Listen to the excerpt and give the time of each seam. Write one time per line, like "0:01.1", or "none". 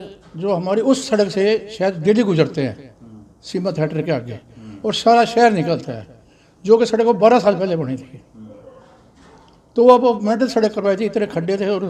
none